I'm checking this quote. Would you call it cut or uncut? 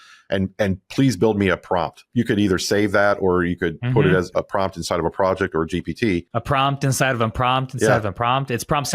cut